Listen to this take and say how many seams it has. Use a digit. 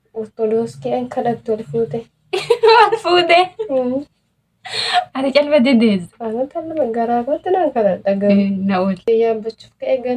1